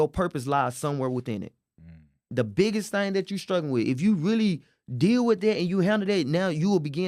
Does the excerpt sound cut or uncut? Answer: uncut